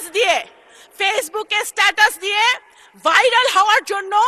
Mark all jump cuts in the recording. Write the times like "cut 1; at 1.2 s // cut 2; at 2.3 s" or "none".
none